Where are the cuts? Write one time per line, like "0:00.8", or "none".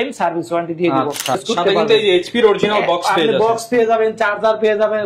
0:01.4

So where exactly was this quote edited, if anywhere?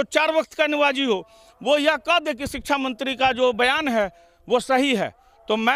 none

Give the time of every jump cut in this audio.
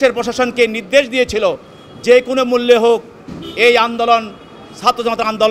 none

